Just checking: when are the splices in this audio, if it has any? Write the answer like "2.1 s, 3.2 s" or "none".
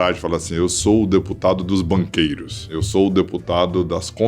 2.7 s